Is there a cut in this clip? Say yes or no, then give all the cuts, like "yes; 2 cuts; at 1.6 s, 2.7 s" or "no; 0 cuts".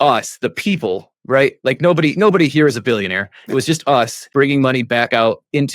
yes; 1 cut; at 4.2 s